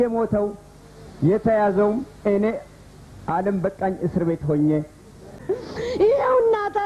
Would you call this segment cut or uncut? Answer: cut